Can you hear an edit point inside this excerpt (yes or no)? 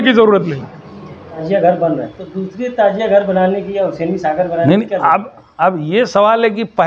yes